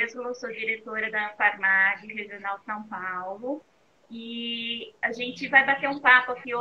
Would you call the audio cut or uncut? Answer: cut